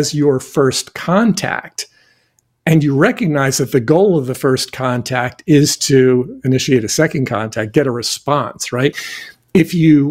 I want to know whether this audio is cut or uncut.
cut